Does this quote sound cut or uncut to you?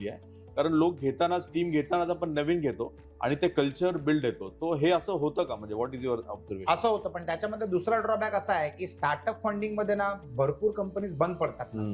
uncut